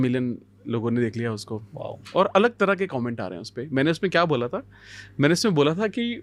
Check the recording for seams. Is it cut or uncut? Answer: uncut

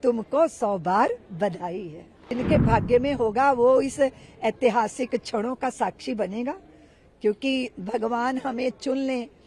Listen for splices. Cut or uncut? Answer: cut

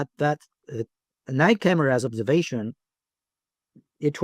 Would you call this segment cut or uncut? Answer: uncut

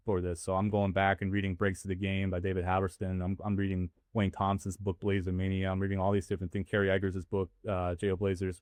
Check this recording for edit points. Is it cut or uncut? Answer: uncut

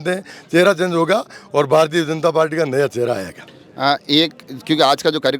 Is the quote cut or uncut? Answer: uncut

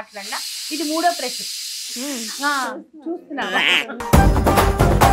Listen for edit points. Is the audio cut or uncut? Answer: cut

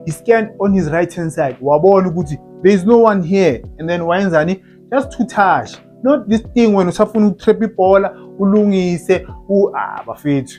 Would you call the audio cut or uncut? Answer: uncut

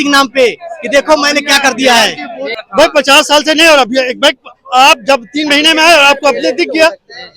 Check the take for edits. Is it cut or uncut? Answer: cut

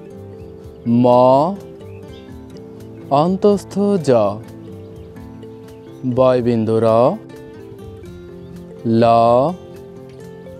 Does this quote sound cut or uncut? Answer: cut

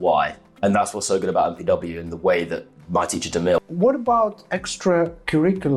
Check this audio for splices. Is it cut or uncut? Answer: cut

